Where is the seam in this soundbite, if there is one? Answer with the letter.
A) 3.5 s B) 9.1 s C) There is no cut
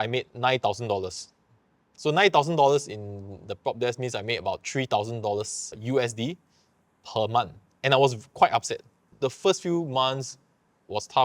B